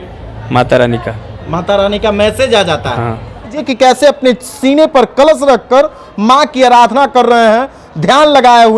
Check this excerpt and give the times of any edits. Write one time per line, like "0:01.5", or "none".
0:03.6